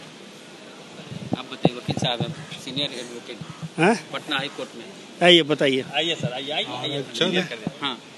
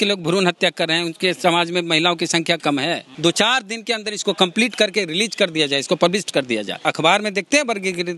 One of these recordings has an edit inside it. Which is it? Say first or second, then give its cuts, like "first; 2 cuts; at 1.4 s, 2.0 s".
second; 2 cuts; at 3.1 s, 6.8 s